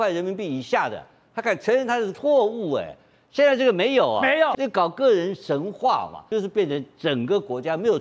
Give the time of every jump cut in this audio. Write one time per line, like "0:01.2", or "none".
0:02.2
0:04.5
0:06.2